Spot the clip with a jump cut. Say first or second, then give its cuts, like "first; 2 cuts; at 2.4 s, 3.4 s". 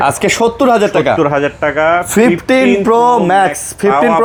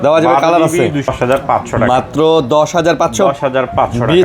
second; 1 cut; at 1.1 s